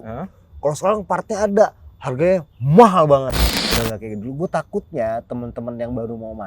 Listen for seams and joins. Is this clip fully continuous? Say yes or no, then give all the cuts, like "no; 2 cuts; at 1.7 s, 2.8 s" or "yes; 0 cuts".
no; 1 cut; at 3.5 s